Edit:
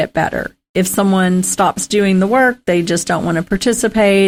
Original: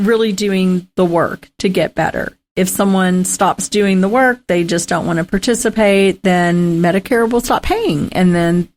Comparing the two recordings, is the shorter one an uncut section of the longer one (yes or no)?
yes